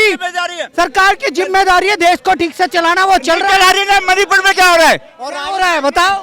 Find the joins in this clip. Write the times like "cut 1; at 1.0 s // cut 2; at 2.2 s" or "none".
none